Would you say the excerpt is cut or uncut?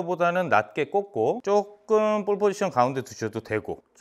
uncut